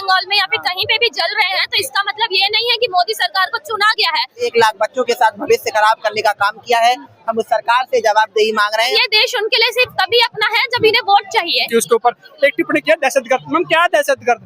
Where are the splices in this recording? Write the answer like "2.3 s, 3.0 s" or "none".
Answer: 4.5 s, 8.9 s, 11.7 s